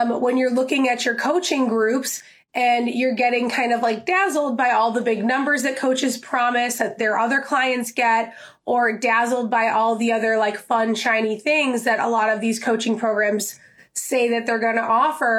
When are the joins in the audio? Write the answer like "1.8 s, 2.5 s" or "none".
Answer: none